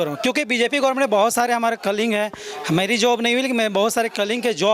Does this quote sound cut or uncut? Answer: uncut